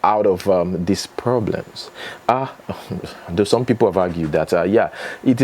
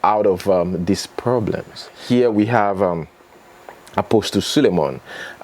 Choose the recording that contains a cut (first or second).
second